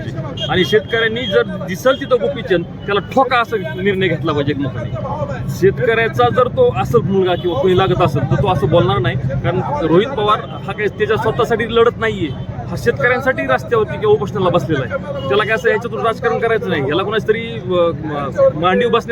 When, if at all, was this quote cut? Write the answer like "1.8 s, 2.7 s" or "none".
none